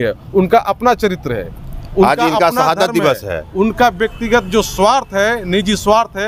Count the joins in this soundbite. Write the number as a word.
zero